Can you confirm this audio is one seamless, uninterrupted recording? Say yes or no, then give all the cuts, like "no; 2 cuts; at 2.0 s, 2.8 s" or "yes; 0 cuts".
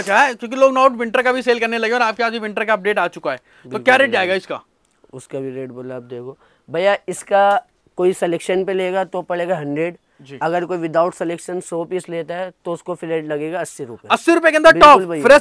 yes; 0 cuts